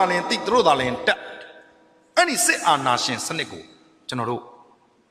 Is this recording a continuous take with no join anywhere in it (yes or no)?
yes